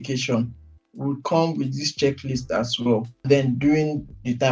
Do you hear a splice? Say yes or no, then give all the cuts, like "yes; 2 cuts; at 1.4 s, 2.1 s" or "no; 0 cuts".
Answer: yes; 1 cut; at 3.2 s